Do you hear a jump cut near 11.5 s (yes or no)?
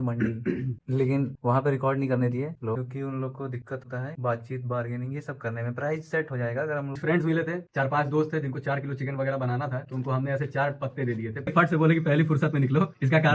yes